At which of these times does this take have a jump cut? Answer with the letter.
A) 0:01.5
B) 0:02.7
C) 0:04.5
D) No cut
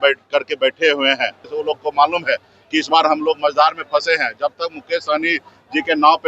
A